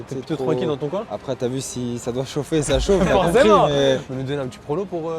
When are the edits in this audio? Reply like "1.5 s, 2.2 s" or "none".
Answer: 1.1 s, 4.0 s

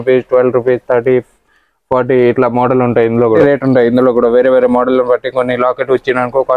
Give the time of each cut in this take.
3.4 s

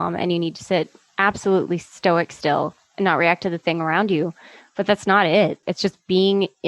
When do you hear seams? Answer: 5.6 s

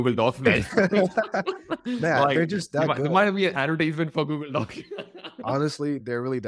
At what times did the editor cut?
none

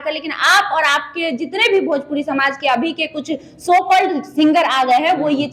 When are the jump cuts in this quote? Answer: none

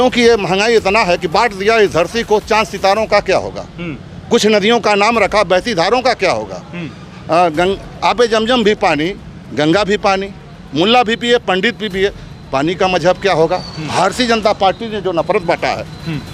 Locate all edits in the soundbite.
none

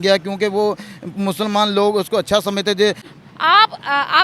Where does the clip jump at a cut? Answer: 3.0 s

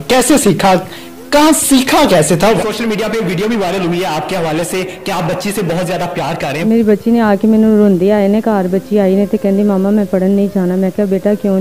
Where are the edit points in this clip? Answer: 2.6 s, 6.4 s

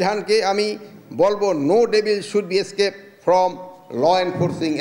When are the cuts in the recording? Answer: none

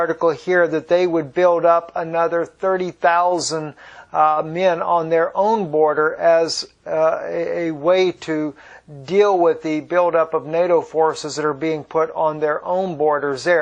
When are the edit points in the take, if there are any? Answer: none

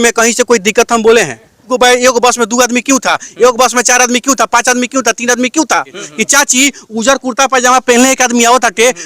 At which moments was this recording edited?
1.7 s, 6.0 s

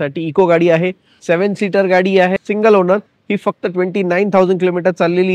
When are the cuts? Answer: 2.4 s

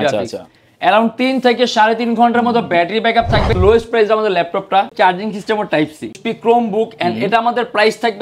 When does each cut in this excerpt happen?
3.6 s, 4.9 s, 6.2 s

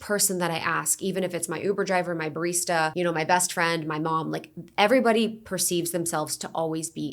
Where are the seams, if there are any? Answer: 2.9 s

